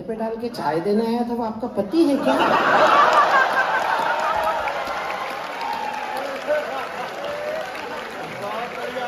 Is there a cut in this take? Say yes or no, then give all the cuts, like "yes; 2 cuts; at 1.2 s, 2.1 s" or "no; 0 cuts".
no; 0 cuts